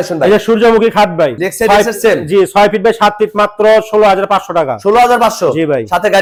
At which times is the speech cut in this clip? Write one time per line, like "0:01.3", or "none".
none